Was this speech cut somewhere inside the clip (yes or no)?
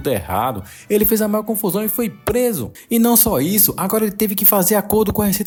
no